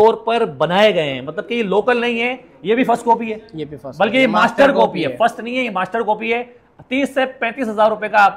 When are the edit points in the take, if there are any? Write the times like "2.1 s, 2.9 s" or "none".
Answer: none

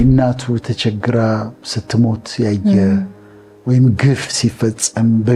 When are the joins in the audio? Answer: none

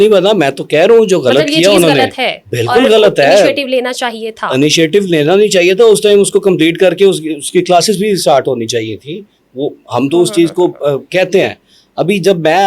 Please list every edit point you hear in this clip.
none

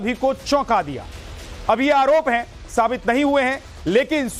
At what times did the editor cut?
2.9 s

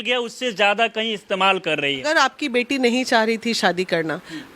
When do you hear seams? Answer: 2.1 s

